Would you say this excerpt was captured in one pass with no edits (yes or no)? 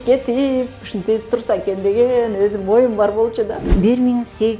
no